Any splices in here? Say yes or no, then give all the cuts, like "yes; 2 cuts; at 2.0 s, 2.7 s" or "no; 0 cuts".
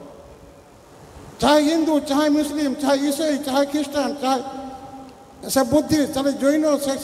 yes; 1 cut; at 1.3 s